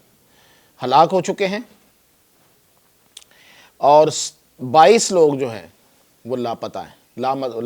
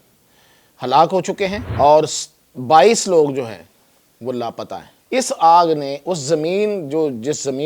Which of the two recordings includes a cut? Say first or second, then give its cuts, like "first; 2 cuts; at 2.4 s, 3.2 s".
second; 2 cuts; at 1.6 s, 4.9 s